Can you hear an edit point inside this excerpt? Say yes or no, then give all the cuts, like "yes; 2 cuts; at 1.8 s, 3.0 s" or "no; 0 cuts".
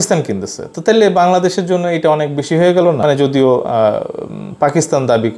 yes; 1 cut; at 3.0 s